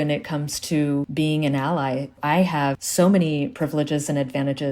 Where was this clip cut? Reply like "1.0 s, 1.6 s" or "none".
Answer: 1.1 s, 2.8 s